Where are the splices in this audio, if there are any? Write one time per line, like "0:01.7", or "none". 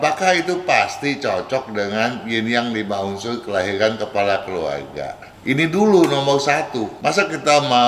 0:05.3
0:06.8